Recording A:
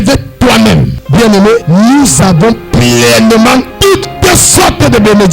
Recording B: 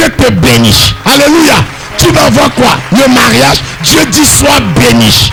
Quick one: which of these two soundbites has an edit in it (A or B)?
A